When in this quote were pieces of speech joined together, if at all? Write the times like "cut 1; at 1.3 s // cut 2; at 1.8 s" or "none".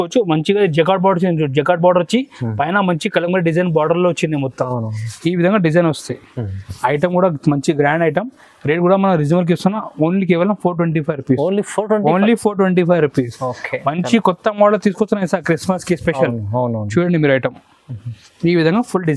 none